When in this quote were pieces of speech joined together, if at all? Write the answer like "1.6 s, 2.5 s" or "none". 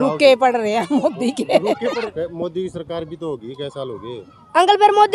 2.1 s